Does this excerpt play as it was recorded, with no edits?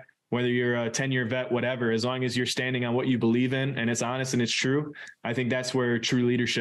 yes; 0 cuts

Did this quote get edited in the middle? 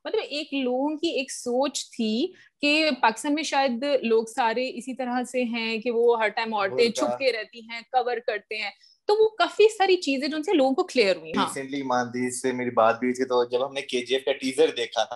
yes; 1 cut; at 11.3 s

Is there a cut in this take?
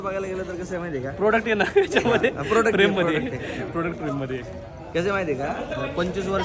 no; 0 cuts

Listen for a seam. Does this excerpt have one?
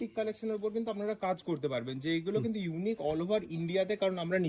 no; 0 cuts

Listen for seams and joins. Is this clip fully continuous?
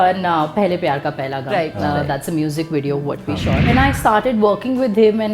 no; 1 cut; at 3.7 s

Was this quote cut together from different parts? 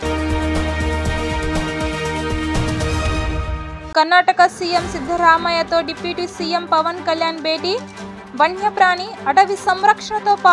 yes; 1 cut; at 3.8 s

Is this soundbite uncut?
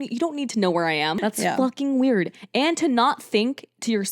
no; 1 cut; at 1.2 s

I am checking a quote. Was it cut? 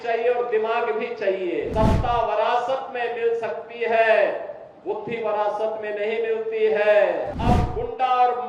yes; 2 cuts; at 1.7 s, 7.3 s

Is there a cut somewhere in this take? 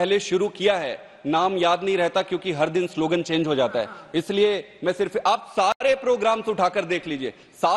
no; 0 cuts

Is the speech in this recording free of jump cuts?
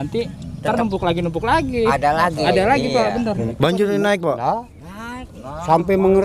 no; 1 cut; at 3.5 s

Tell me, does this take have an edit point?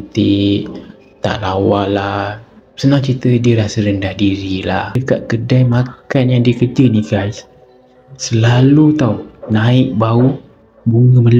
yes; 1 cut; at 5.0 s

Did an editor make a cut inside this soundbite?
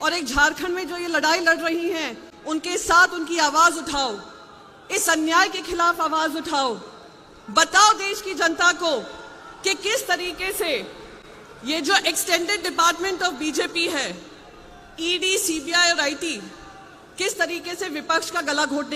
no; 0 cuts

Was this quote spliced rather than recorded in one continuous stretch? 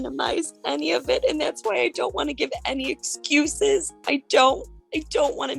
no; 0 cuts

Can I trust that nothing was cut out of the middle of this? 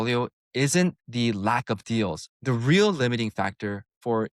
no; 2 cuts; at 1.0 s, 2.3 s

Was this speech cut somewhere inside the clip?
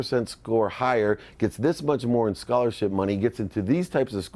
no; 0 cuts

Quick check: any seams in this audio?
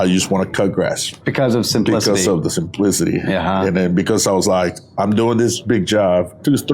no; 0 cuts

